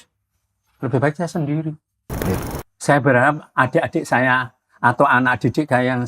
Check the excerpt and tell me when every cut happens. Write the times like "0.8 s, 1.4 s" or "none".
2.3 s